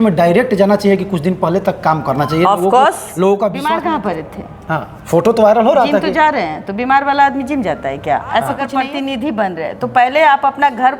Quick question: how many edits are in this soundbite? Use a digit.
2